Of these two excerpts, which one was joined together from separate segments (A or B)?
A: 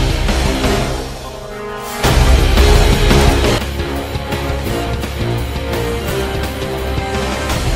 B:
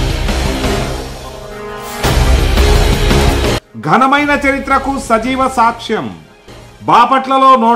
B